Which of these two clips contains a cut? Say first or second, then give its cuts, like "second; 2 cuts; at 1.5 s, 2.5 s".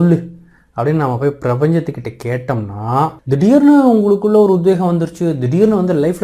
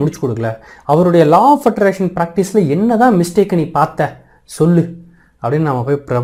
first; 1 cut; at 3.2 s